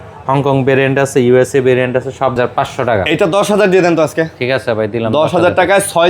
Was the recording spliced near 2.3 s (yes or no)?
yes